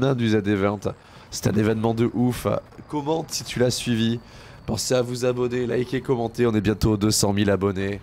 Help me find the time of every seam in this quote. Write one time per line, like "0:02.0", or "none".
none

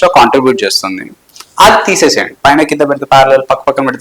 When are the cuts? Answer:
0:02.4

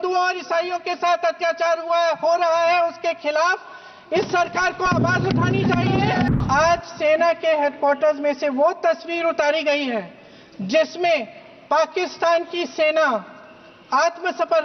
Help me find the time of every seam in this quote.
0:06.4

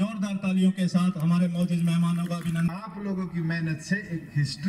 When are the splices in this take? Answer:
0:02.7

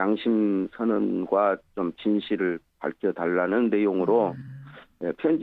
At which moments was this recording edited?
0:02.0

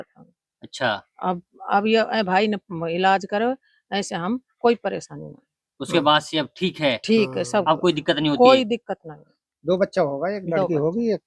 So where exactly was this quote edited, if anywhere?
none

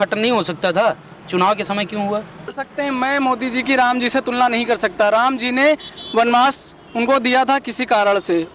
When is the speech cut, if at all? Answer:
0:02.6

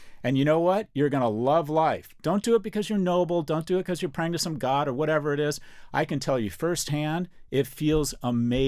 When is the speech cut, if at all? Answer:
none

